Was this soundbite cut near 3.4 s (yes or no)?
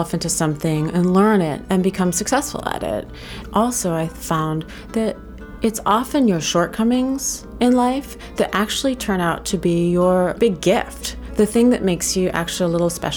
yes